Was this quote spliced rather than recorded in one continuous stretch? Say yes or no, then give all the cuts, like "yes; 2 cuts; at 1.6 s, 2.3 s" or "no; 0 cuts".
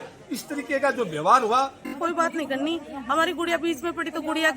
yes; 1 cut; at 1.9 s